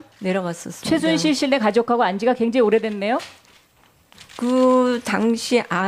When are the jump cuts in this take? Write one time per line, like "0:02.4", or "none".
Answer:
0:02.3